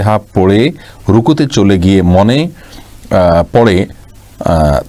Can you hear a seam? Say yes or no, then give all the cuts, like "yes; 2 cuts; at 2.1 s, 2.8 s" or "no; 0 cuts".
no; 0 cuts